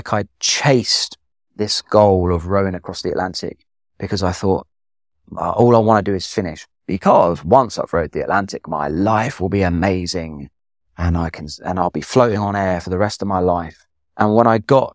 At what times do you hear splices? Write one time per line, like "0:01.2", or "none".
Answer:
0:13.8